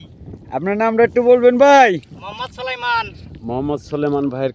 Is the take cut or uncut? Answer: uncut